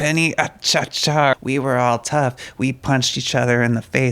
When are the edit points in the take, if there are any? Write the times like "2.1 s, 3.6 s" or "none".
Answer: 1.3 s